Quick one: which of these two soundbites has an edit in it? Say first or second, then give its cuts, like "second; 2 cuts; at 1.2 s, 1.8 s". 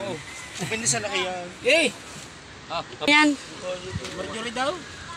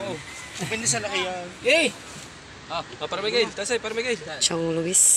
first; 1 cut; at 3.1 s